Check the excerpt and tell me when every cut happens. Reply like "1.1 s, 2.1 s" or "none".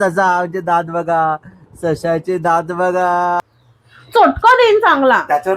3.4 s